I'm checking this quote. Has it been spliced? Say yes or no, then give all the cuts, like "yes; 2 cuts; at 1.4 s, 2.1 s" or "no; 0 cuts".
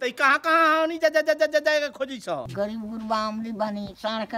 yes; 1 cut; at 2.5 s